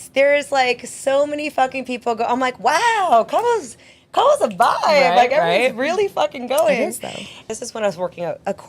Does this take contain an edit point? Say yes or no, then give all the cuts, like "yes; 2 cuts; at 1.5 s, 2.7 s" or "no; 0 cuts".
yes; 1 cut; at 7.5 s